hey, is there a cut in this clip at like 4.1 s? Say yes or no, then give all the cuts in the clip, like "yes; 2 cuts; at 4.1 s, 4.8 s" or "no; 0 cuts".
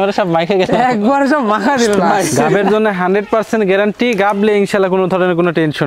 no; 1 cut; at 2.4 s